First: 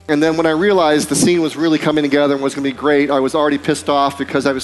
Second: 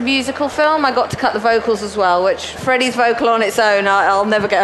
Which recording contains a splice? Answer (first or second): second